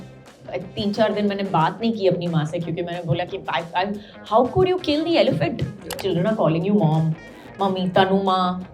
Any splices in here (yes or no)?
yes